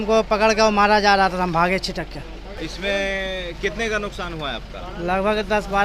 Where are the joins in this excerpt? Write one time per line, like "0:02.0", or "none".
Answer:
0:02.5

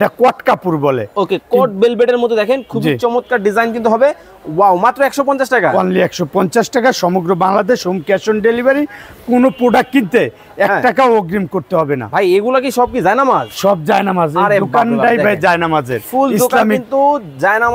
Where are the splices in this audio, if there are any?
none

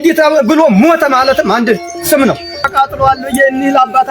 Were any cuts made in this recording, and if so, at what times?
0:02.6

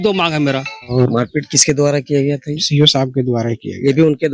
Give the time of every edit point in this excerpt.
0:00.9

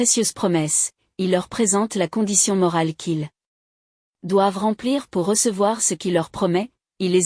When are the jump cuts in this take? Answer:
none

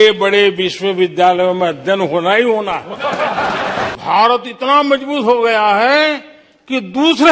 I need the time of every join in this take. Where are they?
0:03.9

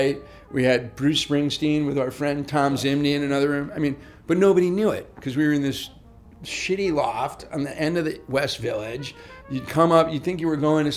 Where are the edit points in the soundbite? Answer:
none

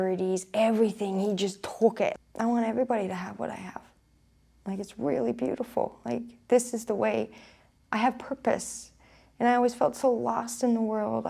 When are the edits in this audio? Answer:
0:02.1

